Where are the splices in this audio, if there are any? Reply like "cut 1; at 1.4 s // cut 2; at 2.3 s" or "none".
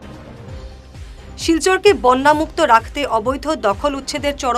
none

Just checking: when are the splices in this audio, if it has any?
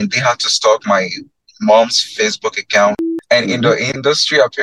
cut 1; at 3.1 s

